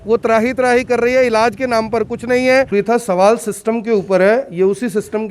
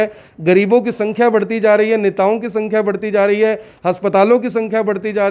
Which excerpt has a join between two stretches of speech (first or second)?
first